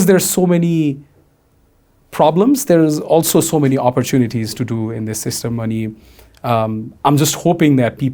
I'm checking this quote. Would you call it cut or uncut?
uncut